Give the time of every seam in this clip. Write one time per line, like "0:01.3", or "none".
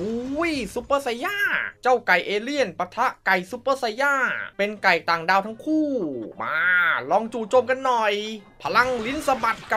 none